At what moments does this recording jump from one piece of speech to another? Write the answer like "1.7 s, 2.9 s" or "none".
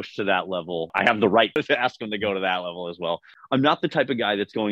0.9 s, 1.6 s, 3.3 s